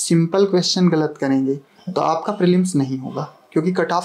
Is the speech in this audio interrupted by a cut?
no; 0 cuts

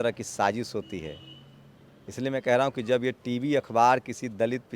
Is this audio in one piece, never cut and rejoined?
yes; 0 cuts

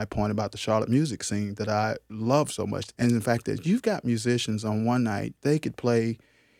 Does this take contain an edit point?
no; 0 cuts

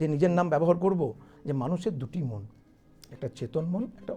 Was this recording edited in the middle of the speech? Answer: yes; 1 cut; at 1.3 s

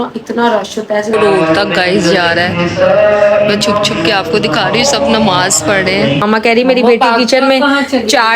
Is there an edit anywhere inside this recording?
yes; 2 cuts; at 1.1 s, 6.2 s

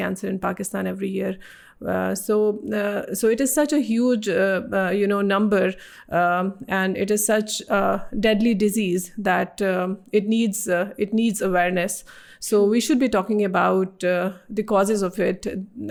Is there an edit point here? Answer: no; 0 cuts

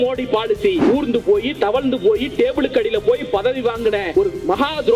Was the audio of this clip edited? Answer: yes; 2 cuts; at 0.8 s, 4.1 s

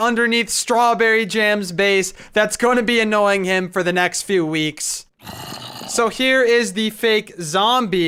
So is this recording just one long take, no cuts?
yes; 0 cuts

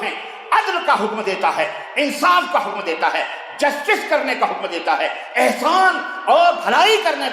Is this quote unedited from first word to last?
yes; 0 cuts

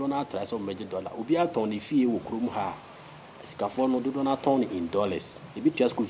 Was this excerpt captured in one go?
yes; 0 cuts

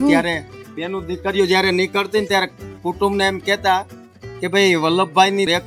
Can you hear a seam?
no; 0 cuts

